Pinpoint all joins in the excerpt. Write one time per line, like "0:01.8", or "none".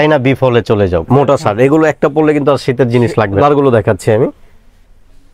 0:01.1
0:03.4